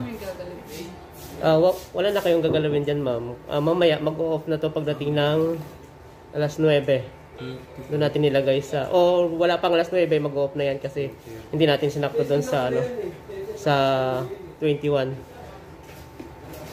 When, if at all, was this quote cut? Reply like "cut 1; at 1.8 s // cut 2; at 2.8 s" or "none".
none